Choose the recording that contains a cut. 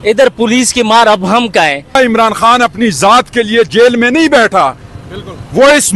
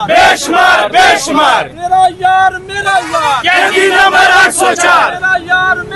first; 1 cut; at 2.0 s

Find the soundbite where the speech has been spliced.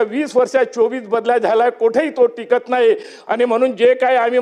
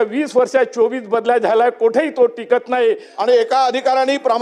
second; 1 cut; at 3.1 s

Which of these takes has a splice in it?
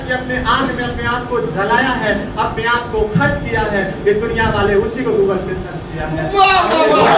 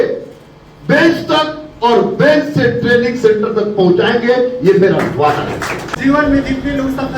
second; 1 cut; at 5.9 s

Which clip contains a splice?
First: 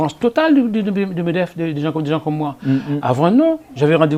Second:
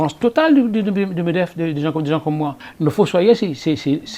second; 1 cut; at 2.6 s

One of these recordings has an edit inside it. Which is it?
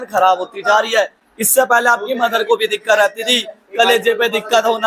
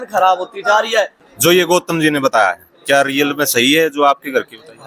second; 1 cut; at 1.2 s

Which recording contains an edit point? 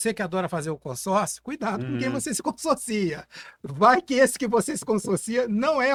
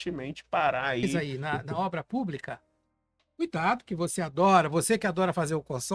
second; 1 cut; at 1.1 s

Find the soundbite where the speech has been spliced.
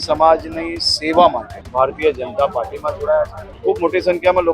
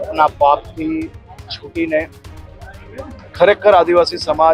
first; 2 cuts; at 1.6 s, 3.4 s

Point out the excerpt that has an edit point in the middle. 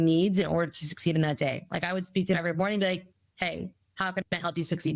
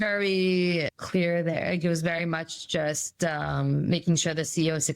second; 1 cut; at 1.0 s

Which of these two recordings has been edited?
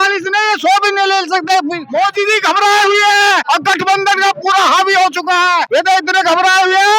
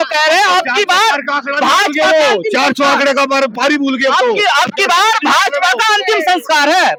first; 3 cuts; at 1.8 s, 3.4 s, 5.7 s

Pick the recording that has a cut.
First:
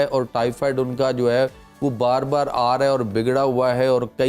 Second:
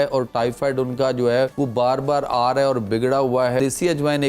second; 2 cuts; at 1.5 s, 3.6 s

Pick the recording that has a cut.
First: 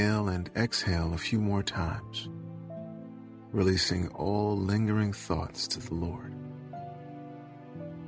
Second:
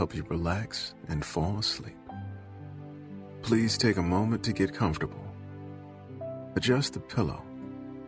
first; 3 cuts; at 2.0 s, 3.5 s, 6.2 s

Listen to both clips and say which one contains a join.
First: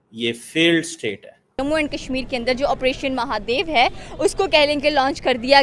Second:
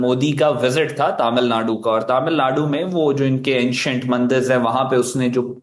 first; 1 cut; at 1.6 s

